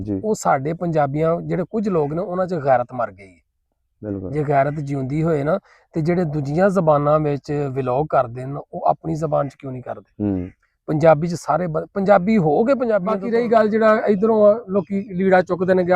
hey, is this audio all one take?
no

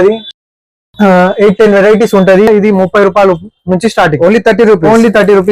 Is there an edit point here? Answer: yes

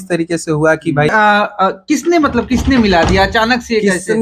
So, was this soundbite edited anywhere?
yes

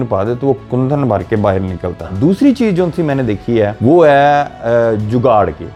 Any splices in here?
no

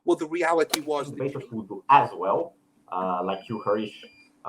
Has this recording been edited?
yes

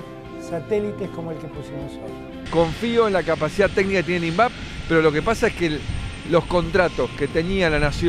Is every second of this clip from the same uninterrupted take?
no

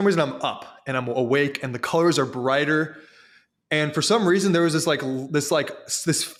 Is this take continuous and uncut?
yes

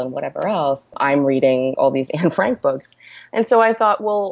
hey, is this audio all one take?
no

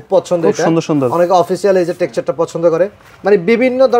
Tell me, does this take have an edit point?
no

